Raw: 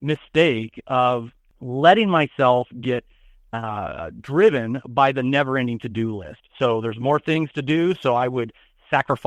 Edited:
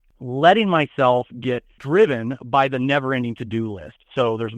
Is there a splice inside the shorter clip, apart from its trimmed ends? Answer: yes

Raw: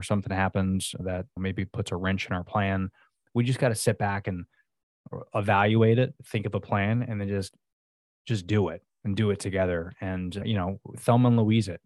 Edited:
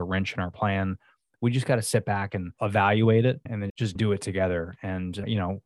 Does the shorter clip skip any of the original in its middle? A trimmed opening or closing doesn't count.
yes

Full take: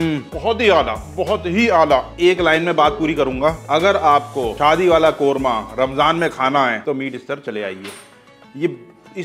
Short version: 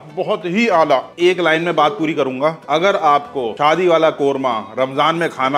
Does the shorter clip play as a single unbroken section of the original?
yes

